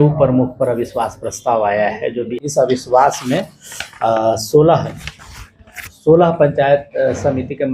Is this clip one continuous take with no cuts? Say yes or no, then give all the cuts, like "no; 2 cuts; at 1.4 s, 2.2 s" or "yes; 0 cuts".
no; 1 cut; at 2.3 s